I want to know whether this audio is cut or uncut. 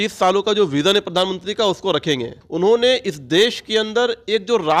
cut